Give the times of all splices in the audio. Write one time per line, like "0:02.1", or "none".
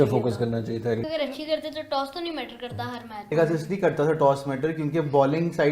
0:01.0
0:03.3

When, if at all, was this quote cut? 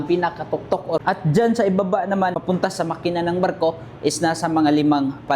0:01.0
0:02.4

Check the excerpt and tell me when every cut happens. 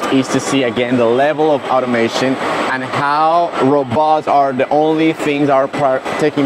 none

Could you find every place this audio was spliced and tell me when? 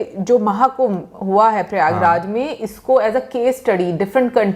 none

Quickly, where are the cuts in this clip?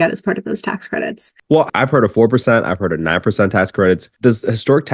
0:01.5

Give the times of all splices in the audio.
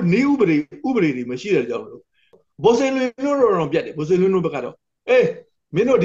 0:02.3

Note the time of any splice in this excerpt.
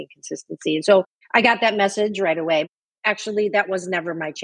0:01.1
0:02.7

